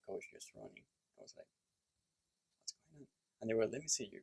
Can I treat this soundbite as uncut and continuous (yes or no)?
yes